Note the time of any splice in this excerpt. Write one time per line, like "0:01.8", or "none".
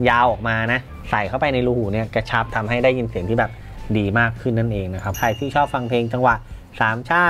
0:00.9
0:02.5
0:05.1